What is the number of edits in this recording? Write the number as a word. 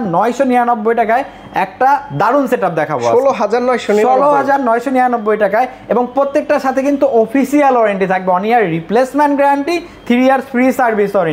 zero